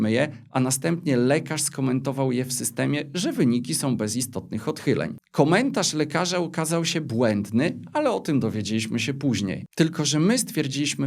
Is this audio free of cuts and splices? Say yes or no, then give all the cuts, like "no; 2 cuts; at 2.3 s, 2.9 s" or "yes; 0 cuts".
no; 2 cuts; at 5.2 s, 9.6 s